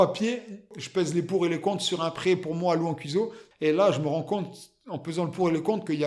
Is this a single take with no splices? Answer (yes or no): yes